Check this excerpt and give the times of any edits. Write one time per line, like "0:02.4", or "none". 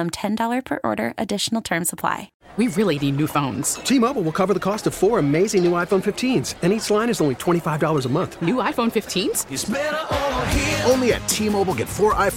0:02.3